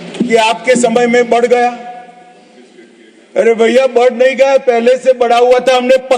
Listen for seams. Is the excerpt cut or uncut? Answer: uncut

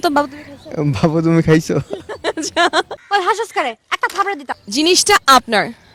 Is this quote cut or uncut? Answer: uncut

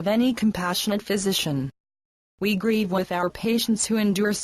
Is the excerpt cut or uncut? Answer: cut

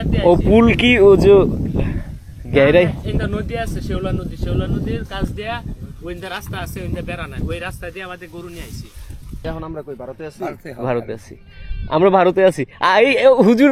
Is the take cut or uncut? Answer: cut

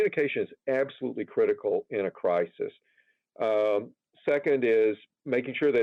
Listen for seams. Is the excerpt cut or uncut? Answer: uncut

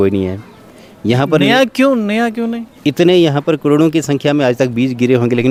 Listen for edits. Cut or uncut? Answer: uncut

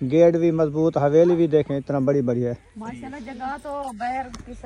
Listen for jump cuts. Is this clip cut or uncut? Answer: uncut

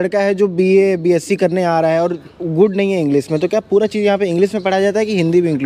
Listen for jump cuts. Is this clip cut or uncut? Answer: uncut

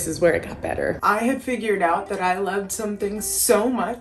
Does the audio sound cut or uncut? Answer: cut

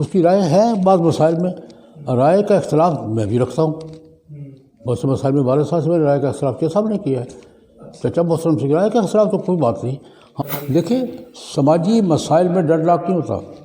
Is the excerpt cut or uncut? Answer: cut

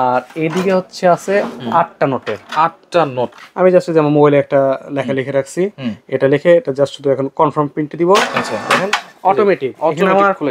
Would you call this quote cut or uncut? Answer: cut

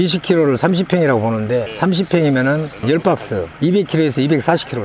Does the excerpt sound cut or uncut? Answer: uncut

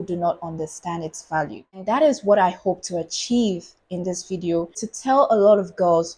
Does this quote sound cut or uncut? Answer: cut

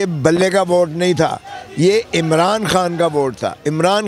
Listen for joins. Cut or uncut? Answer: uncut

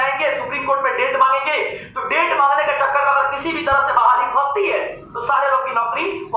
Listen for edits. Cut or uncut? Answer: uncut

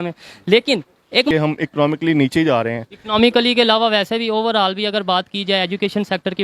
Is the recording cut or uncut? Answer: cut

